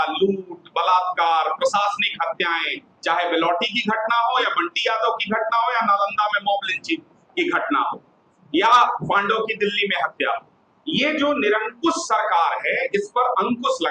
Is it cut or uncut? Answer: uncut